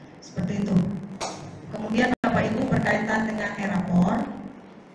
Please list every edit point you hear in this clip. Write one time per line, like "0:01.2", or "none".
none